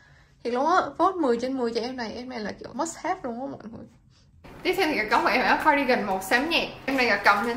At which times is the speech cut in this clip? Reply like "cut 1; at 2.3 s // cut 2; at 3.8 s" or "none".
none